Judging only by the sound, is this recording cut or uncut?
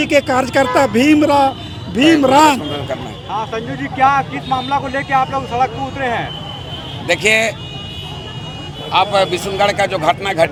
uncut